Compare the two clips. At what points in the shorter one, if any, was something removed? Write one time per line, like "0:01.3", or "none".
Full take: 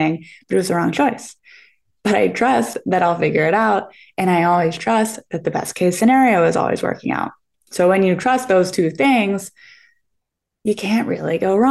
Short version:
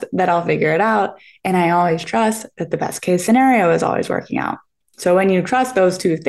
none